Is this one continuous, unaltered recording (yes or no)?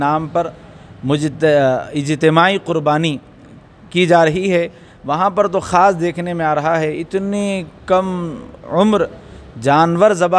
yes